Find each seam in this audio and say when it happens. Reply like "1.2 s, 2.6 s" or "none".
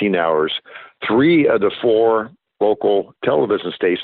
1.0 s